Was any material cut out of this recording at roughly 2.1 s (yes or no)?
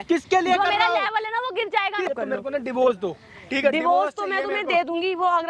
yes